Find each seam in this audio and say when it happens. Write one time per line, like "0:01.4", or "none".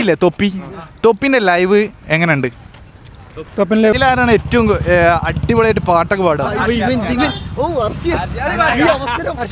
0:03.9